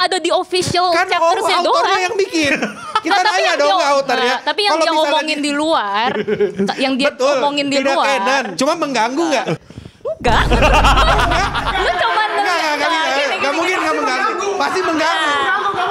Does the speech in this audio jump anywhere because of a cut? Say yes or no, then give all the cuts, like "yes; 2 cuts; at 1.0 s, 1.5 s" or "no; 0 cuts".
yes; 2 cuts; at 8.5 s, 9.6 s